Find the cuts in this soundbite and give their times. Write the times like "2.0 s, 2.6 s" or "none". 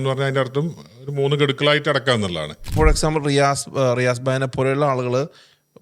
2.7 s